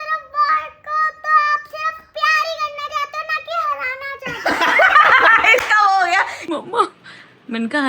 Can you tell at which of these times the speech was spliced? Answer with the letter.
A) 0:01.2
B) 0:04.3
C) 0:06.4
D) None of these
C